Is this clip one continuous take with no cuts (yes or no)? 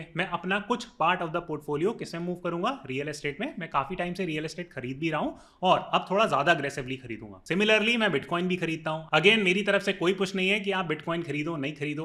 yes